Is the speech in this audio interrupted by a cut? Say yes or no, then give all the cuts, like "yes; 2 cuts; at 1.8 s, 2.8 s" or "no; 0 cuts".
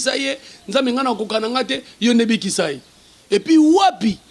no; 0 cuts